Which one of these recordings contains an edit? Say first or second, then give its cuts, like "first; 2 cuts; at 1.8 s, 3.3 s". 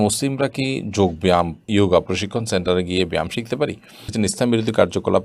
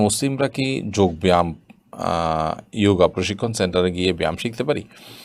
first; 2 cuts; at 1.6 s, 4.1 s